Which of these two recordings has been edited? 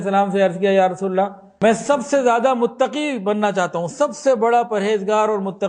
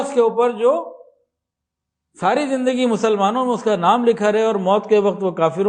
first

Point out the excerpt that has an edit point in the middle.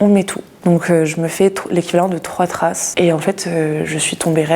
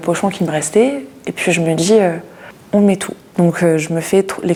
first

